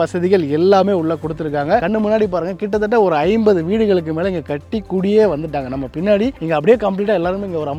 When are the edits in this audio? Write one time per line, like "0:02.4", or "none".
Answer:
none

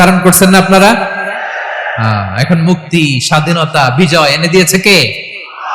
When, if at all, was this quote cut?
none

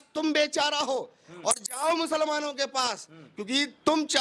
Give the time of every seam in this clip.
none

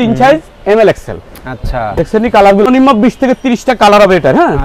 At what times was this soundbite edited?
0:02.7

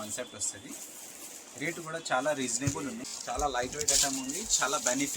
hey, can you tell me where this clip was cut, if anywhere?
0:03.1

